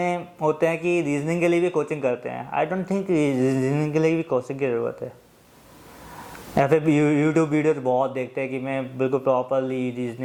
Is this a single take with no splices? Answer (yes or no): yes